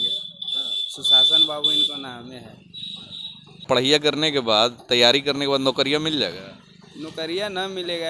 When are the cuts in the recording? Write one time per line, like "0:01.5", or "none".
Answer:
0:03.7